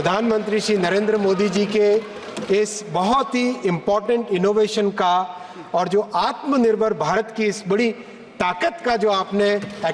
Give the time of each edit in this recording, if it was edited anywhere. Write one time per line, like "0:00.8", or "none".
none